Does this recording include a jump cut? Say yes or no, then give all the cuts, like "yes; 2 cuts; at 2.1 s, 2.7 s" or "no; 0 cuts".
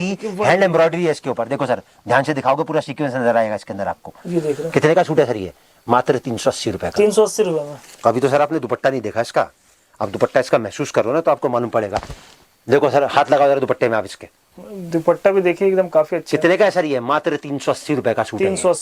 no; 0 cuts